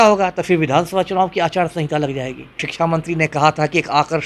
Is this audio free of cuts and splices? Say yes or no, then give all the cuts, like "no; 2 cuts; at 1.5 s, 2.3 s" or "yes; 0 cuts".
no; 1 cut; at 2.7 s